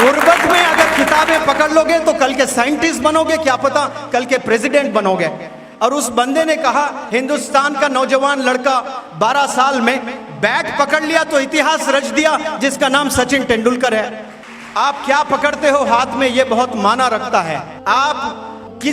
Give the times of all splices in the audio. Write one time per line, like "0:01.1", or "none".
none